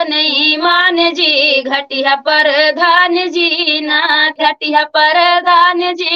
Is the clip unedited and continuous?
no; 1 cut; at 4.3 s

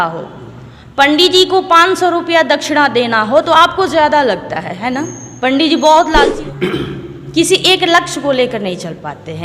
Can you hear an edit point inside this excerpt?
yes; 1 cut; at 6.3 s

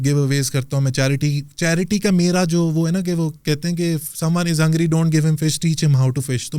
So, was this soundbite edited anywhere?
no; 0 cuts

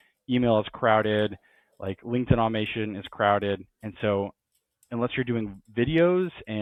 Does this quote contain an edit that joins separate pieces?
no; 0 cuts

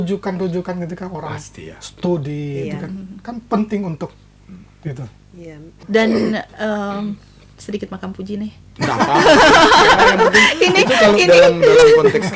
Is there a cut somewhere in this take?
yes; 1 cut; at 5.7 s

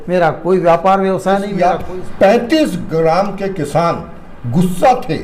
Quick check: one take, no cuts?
no; 1 cut; at 1.5 s

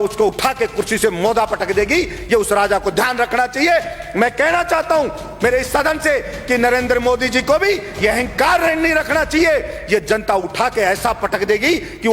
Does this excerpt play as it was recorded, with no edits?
yes; 0 cuts

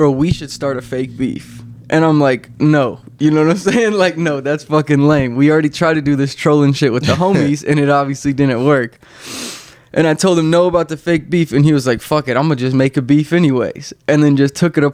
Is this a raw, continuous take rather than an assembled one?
yes; 0 cuts

